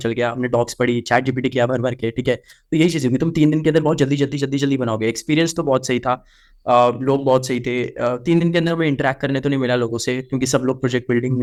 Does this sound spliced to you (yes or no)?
no